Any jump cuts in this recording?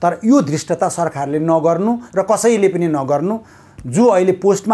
no; 0 cuts

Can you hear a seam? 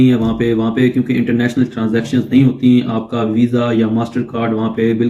no; 0 cuts

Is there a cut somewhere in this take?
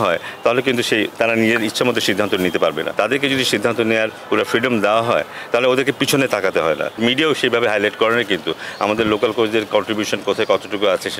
yes; 2 cuts; at 2.9 s, 7.0 s

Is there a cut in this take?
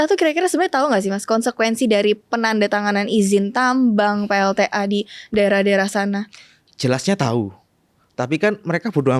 no; 0 cuts

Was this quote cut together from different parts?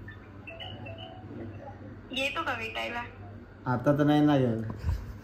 no; 0 cuts

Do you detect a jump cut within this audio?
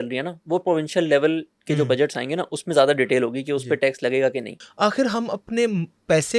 yes; 1 cut; at 4.6 s

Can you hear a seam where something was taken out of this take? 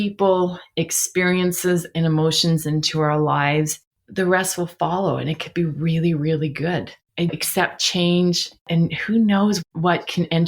yes; 1 cut; at 8.7 s

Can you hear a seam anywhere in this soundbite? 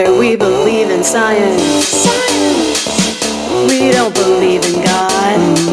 no; 0 cuts

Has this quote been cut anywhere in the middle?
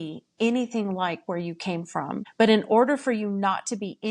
yes; 1 cut; at 2.3 s

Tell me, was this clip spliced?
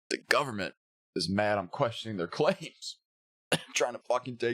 no; 0 cuts

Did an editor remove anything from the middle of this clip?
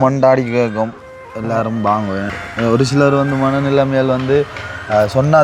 yes; 1 cut; at 2.4 s

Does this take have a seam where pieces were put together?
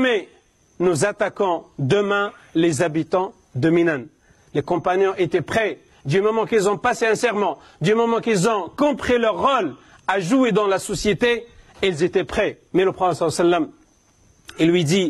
yes; 1 cut; at 12.6 s

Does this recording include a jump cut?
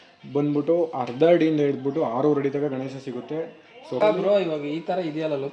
yes; 1 cut; at 4.0 s

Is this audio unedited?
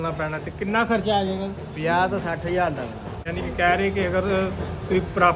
no; 1 cut; at 3.4 s

